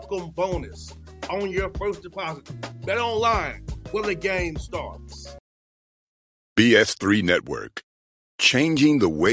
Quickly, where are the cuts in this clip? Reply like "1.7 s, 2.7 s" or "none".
5.2 s